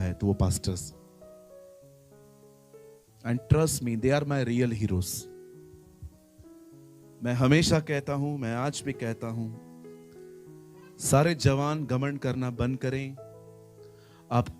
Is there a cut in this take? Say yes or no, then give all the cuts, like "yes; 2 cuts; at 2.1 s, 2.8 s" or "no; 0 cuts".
yes; 4 cuts; at 0.8 s, 3.2 s, 9.5 s, 11.0 s